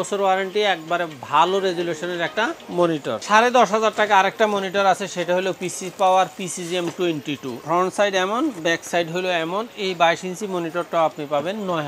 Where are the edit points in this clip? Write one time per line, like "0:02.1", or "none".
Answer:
0:03.2
0:07.6